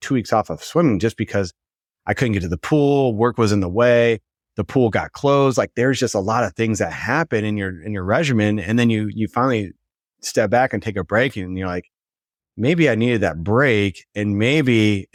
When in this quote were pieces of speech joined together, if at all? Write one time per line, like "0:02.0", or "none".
none